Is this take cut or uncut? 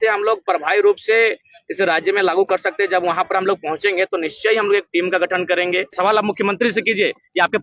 cut